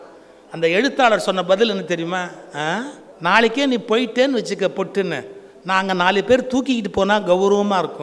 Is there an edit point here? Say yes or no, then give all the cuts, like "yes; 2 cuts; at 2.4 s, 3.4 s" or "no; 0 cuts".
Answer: yes; 1 cut; at 3.0 s